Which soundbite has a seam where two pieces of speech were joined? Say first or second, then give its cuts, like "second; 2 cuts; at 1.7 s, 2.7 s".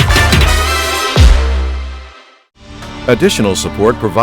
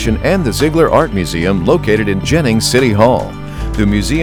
first; 1 cut; at 2.9 s